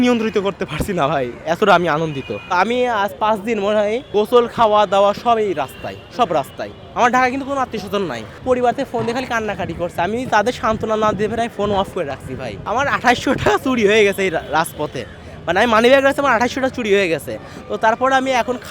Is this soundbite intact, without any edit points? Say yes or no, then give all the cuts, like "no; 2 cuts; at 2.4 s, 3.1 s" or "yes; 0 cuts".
no; 4 cuts; at 2.5 s, 4.1 s, 8.3 s, 12.5 s